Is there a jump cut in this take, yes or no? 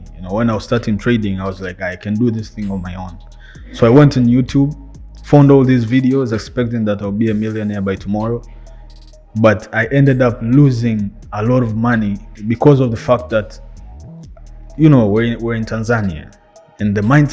yes